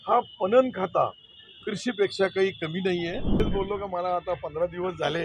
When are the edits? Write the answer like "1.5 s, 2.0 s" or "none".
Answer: 3.4 s